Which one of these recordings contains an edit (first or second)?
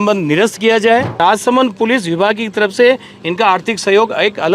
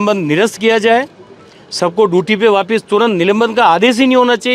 first